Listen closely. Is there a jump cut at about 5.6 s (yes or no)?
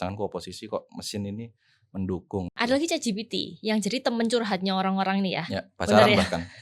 no